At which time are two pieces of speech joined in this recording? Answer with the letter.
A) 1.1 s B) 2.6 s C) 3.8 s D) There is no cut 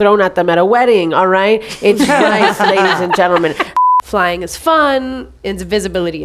C